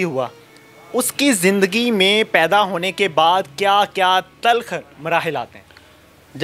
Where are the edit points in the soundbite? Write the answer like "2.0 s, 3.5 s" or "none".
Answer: none